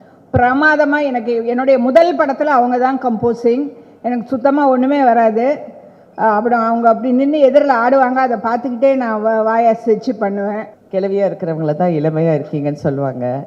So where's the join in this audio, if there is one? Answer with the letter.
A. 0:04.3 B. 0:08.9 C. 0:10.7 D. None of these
C